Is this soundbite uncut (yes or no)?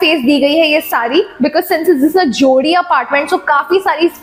yes